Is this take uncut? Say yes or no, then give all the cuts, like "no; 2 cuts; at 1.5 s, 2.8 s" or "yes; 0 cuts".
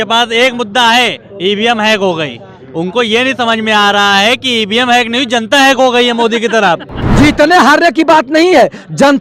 no; 1 cut; at 7.0 s